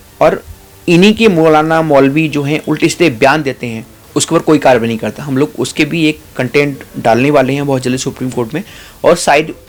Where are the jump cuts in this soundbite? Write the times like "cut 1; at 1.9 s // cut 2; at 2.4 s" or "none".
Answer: none